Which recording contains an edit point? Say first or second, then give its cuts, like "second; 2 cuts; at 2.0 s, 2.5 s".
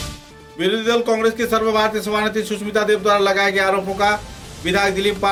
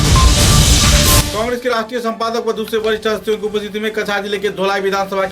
second; 1 cut; at 1.3 s